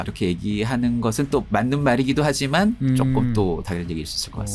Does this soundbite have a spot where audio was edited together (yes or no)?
yes